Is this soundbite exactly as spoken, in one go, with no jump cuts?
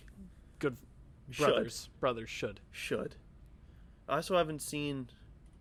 yes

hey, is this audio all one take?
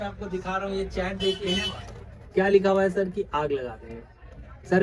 yes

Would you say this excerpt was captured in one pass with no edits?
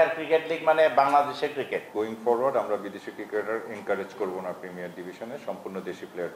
no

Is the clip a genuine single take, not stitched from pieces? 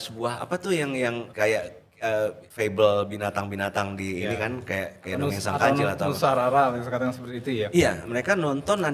no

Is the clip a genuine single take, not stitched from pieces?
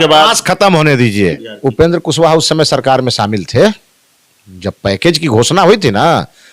no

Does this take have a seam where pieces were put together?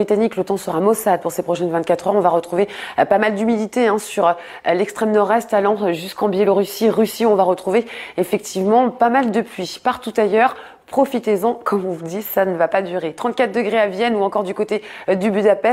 yes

